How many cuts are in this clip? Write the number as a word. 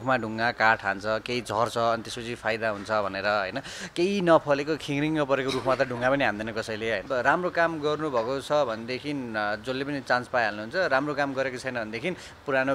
one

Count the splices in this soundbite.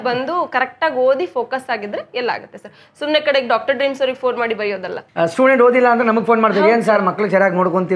one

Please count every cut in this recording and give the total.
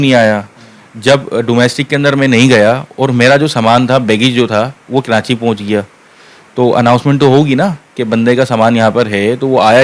zero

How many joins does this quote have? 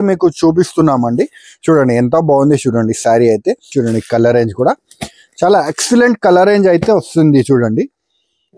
one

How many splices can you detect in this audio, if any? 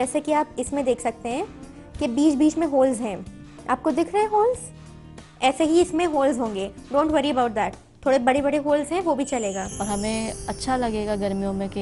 one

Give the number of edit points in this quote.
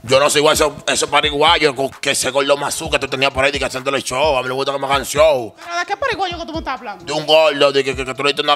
zero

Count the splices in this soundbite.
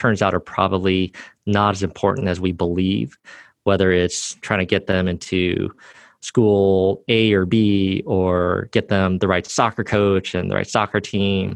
two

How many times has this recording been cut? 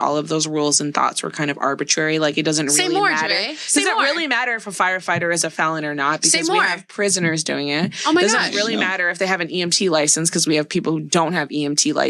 zero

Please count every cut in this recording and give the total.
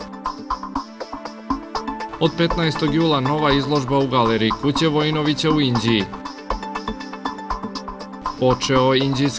zero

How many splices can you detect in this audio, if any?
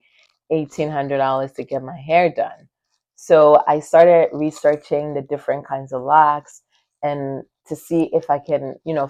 zero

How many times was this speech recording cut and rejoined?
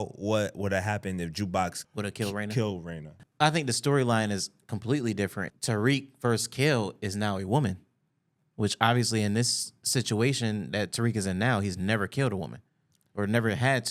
two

